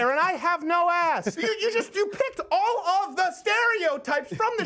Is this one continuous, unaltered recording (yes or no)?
no